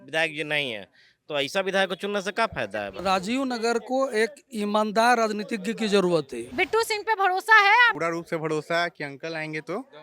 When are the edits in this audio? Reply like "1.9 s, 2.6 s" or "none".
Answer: 3.0 s, 6.4 s, 7.9 s